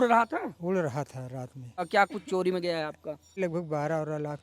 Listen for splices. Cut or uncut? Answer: cut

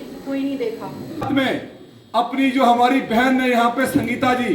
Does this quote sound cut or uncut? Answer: cut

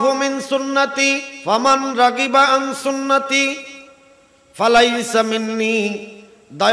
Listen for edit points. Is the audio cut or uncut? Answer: cut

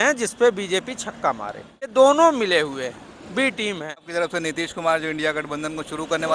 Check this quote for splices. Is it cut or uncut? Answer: cut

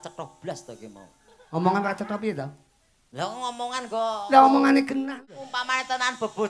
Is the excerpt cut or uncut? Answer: cut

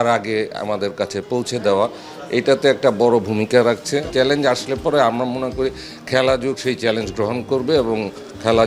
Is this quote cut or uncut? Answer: cut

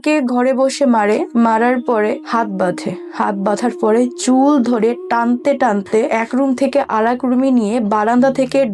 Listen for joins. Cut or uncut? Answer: cut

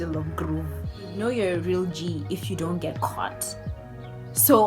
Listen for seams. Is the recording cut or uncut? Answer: cut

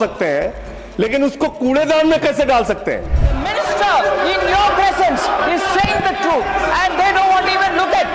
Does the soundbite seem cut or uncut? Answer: cut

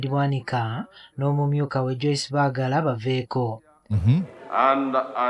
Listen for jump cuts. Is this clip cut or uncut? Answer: uncut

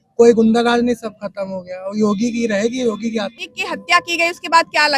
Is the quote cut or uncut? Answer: cut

